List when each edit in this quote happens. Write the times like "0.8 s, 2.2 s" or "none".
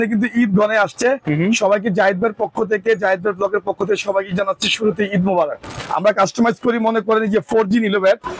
5.8 s